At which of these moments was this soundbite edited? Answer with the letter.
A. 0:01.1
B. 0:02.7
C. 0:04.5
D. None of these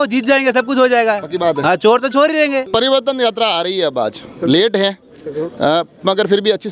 B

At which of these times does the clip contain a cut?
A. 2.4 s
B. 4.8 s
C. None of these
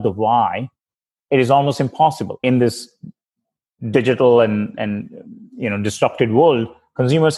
A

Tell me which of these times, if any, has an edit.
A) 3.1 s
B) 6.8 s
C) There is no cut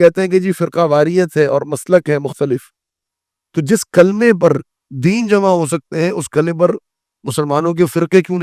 C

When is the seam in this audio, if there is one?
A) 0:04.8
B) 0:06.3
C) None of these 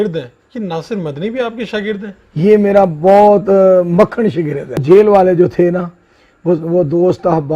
A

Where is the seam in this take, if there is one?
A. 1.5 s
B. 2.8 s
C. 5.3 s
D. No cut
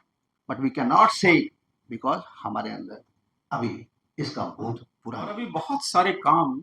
C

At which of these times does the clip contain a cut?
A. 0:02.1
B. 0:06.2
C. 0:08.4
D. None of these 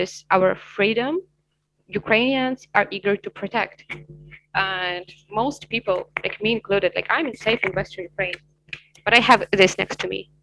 D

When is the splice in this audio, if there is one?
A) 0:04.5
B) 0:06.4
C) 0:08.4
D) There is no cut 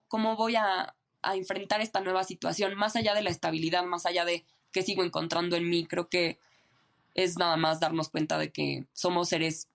D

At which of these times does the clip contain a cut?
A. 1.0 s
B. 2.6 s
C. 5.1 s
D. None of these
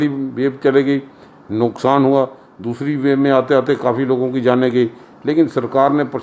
D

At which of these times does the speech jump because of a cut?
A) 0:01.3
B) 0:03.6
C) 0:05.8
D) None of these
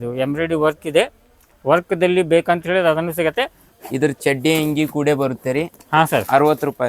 B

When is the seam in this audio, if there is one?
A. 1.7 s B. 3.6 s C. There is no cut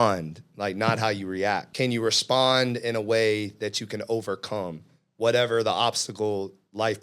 A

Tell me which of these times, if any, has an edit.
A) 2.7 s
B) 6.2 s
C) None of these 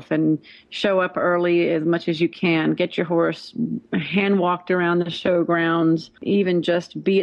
B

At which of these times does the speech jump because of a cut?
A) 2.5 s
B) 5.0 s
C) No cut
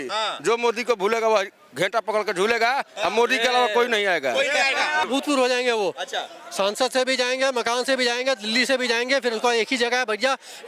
B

